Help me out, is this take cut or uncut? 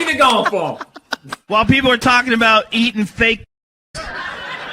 cut